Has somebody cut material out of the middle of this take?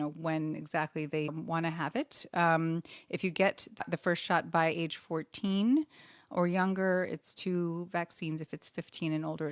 yes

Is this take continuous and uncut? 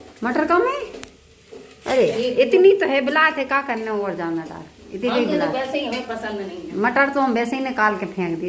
yes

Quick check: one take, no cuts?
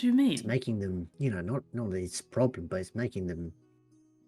no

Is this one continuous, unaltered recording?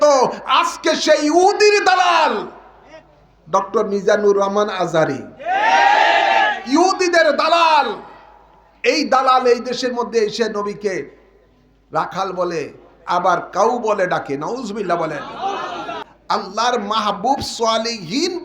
no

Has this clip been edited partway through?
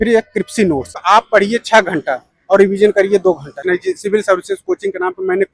yes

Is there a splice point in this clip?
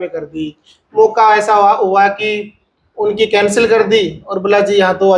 no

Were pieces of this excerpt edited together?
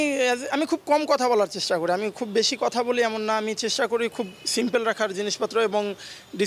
no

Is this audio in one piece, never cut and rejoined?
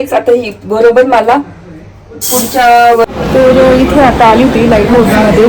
no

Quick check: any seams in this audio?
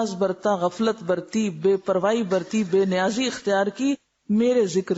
no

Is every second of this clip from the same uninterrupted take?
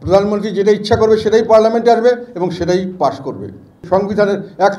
no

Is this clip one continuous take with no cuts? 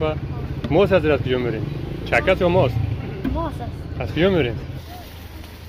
no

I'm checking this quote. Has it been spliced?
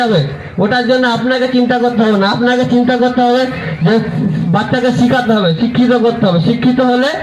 no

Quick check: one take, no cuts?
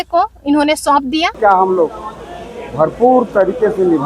no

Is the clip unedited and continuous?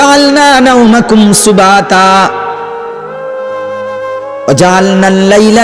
no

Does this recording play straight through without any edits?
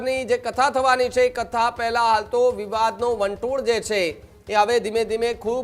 yes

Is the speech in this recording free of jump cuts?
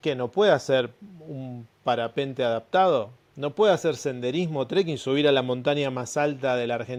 yes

